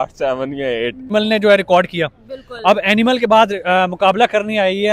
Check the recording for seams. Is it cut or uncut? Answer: cut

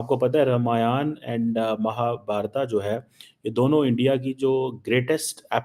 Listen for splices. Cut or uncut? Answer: uncut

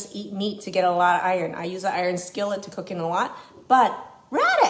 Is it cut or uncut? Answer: uncut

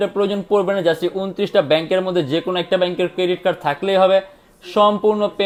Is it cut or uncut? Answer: uncut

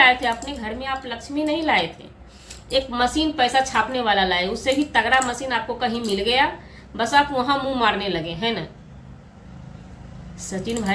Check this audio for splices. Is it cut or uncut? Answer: uncut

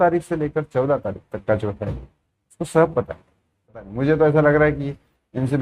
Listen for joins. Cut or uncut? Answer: cut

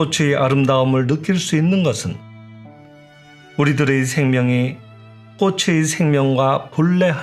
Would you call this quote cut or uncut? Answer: uncut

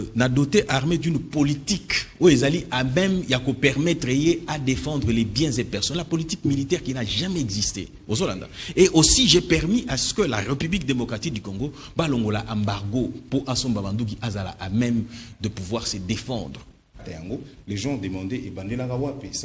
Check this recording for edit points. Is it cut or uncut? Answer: cut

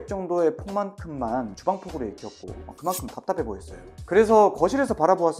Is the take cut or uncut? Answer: uncut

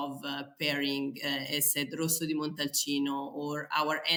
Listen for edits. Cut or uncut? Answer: uncut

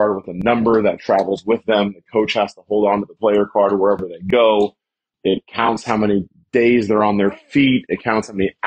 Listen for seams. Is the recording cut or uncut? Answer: cut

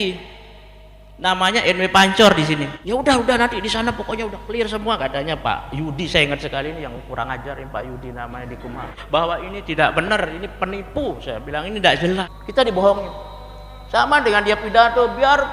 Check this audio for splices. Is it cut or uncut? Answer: cut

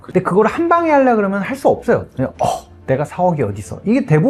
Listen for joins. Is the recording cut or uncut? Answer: uncut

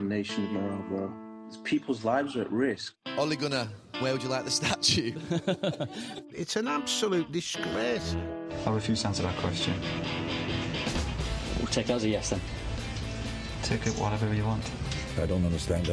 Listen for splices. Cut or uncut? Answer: uncut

